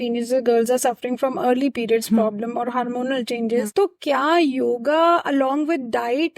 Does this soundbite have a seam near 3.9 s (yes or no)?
no